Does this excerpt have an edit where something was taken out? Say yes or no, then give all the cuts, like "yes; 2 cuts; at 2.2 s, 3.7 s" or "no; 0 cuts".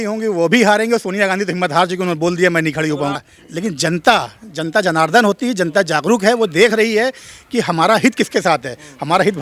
yes; 1 cut; at 3.2 s